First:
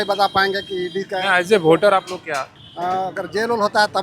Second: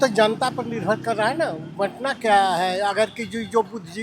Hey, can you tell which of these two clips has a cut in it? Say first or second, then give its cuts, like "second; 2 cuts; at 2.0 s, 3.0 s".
first; 1 cut; at 2.6 s